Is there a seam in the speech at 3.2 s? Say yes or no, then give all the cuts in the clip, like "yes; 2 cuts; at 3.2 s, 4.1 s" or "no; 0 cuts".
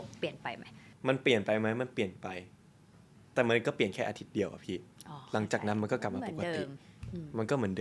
no; 0 cuts